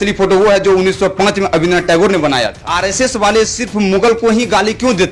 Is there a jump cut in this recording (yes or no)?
yes